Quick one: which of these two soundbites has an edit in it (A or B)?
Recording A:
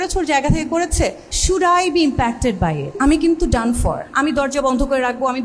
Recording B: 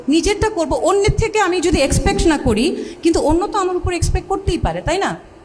A